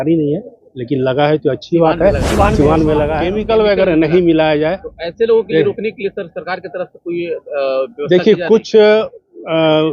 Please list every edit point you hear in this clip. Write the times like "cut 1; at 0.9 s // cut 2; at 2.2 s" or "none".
cut 1; at 3.3 s

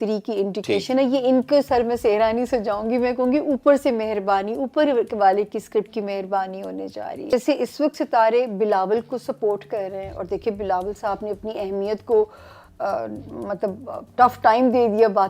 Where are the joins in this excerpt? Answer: cut 1; at 7.3 s

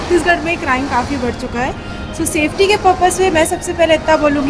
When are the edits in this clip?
none

